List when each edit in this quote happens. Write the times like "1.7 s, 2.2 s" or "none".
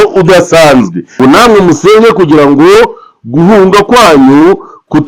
1.0 s